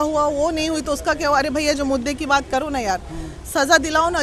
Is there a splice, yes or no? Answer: no